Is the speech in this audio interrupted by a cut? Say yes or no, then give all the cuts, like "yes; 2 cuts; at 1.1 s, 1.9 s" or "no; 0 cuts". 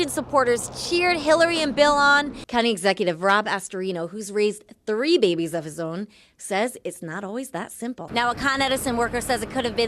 yes; 2 cuts; at 2.4 s, 8.0 s